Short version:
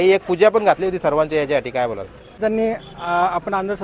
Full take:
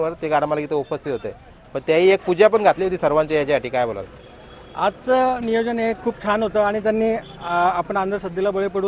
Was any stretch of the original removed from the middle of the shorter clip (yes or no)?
yes